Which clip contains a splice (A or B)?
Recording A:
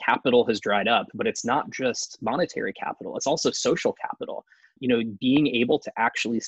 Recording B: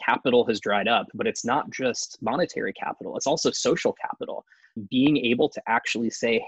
B